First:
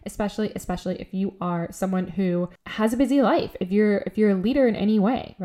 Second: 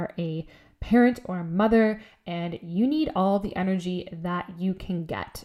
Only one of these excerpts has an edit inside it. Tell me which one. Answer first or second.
first